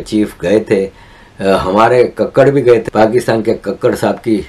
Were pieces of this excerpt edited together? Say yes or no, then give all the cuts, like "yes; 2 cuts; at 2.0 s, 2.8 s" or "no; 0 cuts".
yes; 1 cut; at 2.8 s